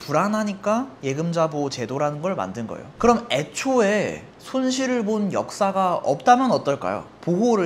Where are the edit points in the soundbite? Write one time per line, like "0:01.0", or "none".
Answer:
0:02.8

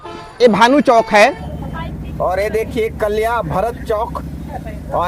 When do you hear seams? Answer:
0:02.0

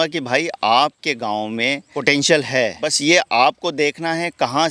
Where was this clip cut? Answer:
0:01.9
0:02.9

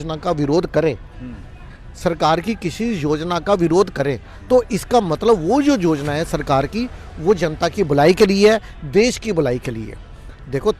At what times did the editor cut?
none

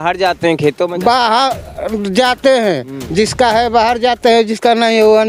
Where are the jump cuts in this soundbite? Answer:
none

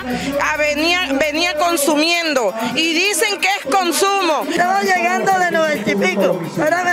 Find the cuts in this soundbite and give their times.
0:04.5

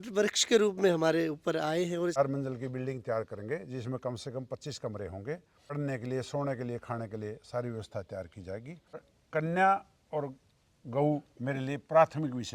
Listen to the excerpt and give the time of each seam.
0:02.2
0:05.8
0:09.1

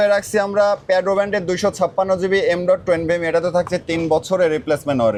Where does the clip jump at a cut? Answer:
none

